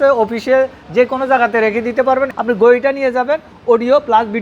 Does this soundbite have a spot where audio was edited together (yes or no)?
yes